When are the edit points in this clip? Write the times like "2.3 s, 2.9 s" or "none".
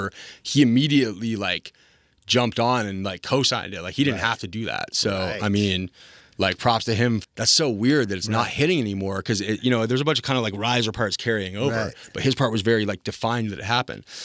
7.2 s